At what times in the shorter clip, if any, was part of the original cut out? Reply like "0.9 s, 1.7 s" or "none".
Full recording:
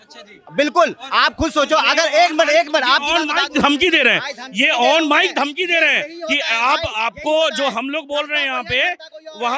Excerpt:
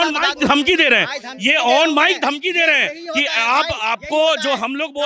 none